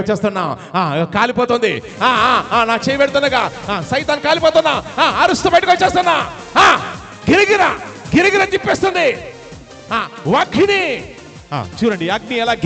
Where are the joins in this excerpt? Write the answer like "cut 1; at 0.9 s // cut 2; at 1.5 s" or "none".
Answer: none